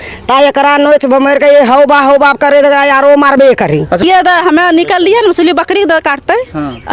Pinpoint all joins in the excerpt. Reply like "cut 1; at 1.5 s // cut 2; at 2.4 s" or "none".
cut 1; at 4.0 s